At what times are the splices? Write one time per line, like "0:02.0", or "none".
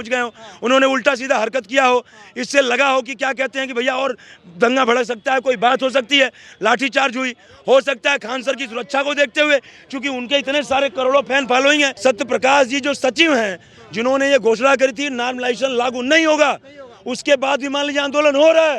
0:11.9